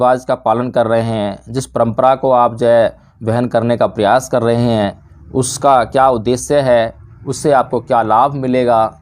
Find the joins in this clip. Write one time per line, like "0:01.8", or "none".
none